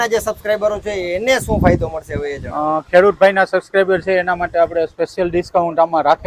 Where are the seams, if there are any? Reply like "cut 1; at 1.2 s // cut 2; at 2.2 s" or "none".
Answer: none